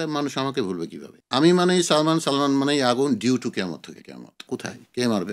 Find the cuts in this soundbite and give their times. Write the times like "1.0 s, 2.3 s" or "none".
4.4 s